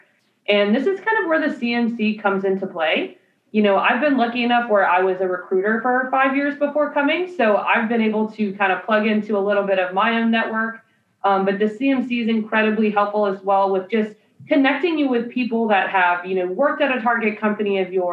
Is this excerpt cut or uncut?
uncut